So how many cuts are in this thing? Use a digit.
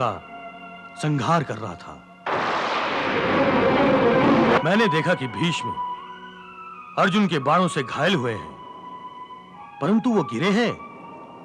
2